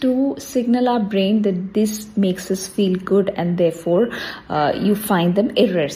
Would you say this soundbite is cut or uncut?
uncut